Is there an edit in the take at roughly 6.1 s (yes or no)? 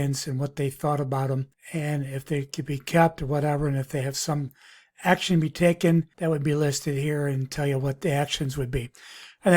yes